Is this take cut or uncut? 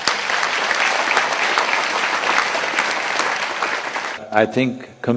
cut